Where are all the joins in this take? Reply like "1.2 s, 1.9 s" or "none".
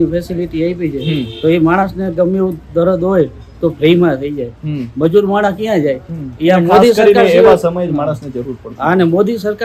none